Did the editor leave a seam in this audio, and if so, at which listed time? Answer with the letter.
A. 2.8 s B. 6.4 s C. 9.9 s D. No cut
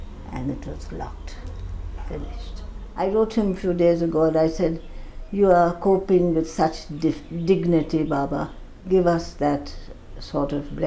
A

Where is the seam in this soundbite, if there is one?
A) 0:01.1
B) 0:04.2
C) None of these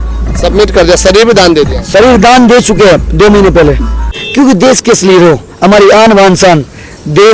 B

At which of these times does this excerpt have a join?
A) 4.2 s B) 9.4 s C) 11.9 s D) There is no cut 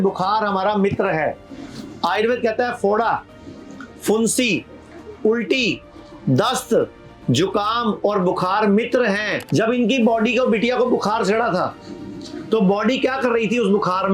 B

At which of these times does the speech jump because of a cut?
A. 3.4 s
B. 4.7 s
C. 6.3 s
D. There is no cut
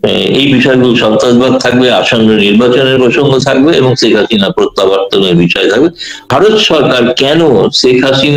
C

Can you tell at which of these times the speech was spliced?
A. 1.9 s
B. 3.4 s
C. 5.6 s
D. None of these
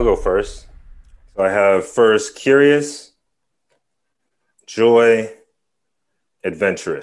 D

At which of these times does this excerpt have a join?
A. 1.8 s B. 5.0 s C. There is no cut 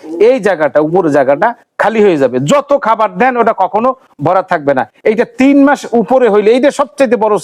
C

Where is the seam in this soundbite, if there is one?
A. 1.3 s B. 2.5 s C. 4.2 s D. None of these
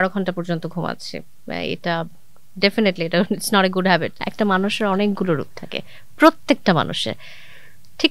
C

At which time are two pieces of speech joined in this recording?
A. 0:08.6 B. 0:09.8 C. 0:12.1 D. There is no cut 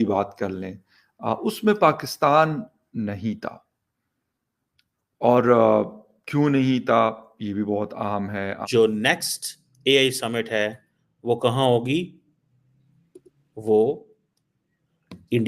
A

